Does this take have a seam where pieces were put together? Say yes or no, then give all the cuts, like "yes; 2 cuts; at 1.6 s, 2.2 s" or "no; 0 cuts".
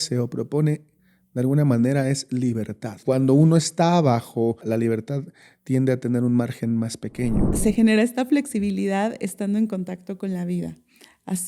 yes; 3 cuts; at 3.0 s, 4.6 s, 7.6 s